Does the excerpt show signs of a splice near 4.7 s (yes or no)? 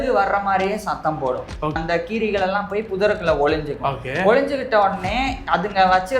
no